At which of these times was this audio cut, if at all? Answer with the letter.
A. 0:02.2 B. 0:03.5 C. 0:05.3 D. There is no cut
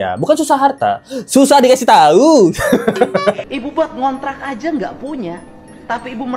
B